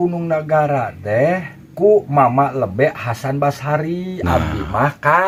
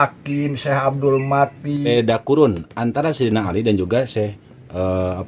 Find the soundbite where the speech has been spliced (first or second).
second